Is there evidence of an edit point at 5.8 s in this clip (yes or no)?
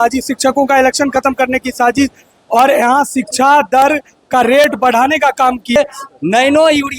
yes